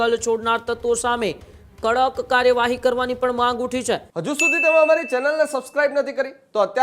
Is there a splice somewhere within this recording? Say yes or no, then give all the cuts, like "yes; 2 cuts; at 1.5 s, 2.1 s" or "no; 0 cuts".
yes; 1 cut; at 4.1 s